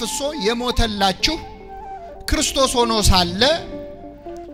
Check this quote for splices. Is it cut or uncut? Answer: uncut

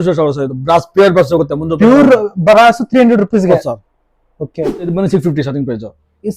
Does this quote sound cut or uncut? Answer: cut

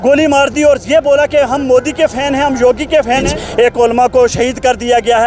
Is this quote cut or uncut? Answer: cut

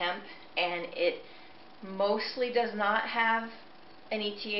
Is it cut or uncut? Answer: uncut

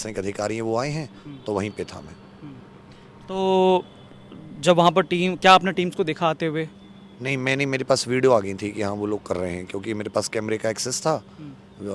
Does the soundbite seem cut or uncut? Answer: uncut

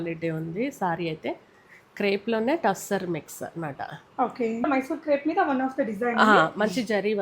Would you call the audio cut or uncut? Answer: cut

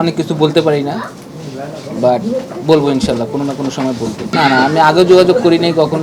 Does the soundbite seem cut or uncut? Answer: uncut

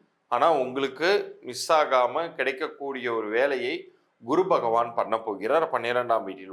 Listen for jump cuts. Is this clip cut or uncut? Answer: uncut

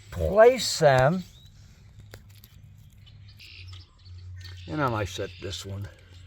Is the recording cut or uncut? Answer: cut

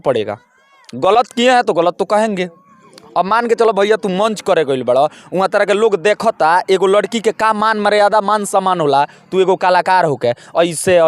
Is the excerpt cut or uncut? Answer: uncut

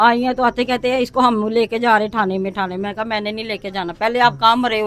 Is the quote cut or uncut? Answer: uncut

